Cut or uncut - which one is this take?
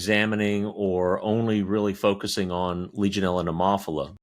uncut